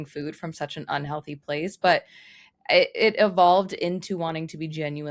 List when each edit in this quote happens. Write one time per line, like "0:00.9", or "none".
none